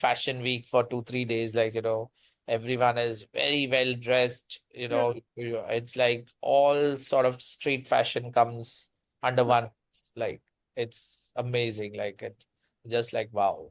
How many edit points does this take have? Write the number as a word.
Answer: zero